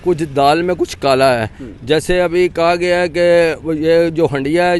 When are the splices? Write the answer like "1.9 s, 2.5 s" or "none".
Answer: none